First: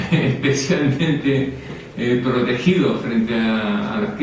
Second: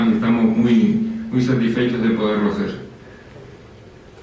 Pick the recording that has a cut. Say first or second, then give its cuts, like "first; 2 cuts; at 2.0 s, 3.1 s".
first; 1 cut; at 1.2 s